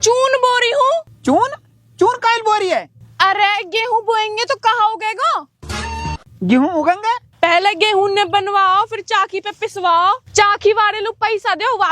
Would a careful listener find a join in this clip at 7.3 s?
yes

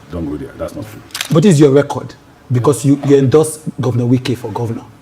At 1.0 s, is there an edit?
yes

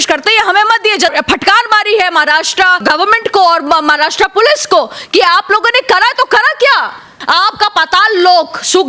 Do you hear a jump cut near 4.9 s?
no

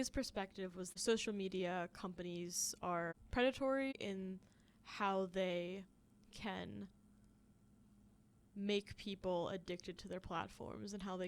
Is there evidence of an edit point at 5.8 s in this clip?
no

